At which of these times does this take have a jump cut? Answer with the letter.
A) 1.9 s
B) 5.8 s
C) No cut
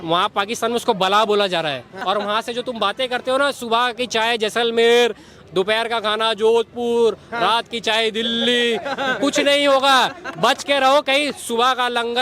A